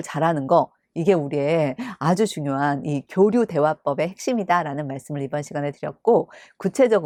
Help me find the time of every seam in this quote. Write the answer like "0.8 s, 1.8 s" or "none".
none